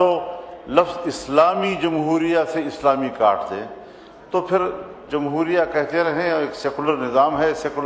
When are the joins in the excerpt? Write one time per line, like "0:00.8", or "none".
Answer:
none